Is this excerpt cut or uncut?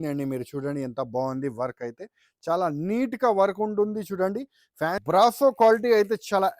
cut